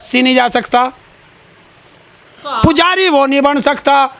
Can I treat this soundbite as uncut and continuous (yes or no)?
yes